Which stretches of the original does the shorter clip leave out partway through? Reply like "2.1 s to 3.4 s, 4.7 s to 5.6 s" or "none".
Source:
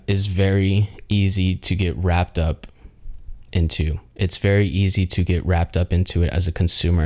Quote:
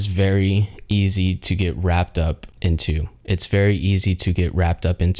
2.7 s to 3.4 s